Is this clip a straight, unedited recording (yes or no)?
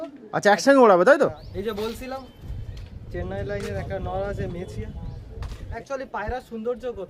no